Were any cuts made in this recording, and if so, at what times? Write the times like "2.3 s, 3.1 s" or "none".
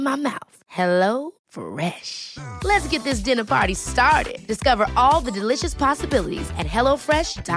none